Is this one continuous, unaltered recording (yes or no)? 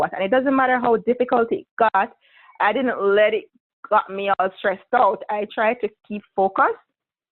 yes